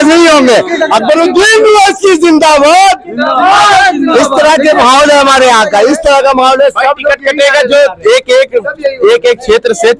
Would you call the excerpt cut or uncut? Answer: uncut